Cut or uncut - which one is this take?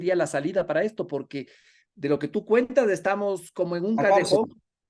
uncut